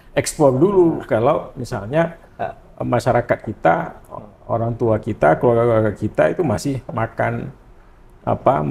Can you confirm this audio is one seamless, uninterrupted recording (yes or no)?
yes